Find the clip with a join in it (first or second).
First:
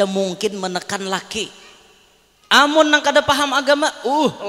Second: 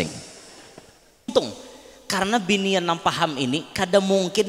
second